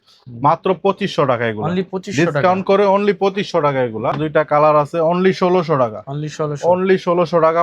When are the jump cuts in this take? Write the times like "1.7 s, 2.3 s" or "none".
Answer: 4.1 s